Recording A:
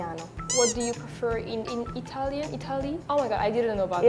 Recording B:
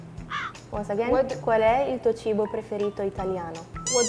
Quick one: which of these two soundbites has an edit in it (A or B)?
A